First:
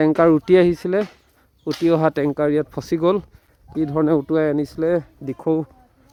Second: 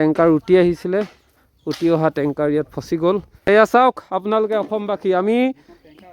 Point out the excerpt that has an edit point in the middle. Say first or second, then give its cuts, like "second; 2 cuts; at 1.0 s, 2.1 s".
second; 1 cut; at 3.3 s